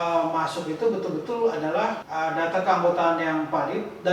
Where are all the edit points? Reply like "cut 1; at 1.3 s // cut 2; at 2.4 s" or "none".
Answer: cut 1; at 2.0 s